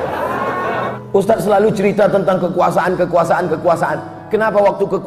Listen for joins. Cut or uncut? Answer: cut